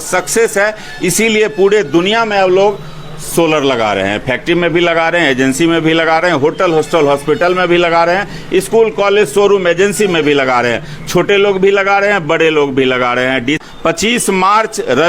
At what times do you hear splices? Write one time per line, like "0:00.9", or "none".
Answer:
0:13.6